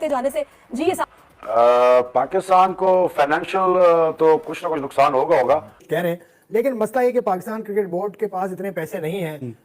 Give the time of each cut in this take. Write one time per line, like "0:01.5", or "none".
0:05.8